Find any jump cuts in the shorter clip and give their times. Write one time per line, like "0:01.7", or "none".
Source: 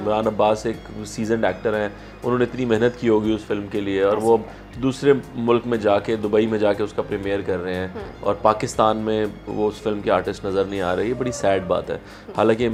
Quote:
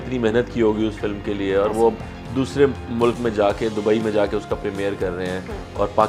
none